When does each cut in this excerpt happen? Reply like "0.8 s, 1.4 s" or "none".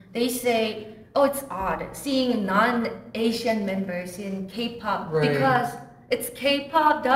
none